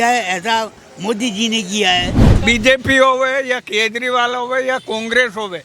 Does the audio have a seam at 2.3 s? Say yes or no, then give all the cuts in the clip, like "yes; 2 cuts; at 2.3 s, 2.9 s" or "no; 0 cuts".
yes; 1 cut; at 2.3 s